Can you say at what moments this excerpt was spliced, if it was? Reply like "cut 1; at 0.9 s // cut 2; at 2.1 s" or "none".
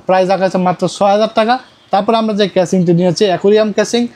none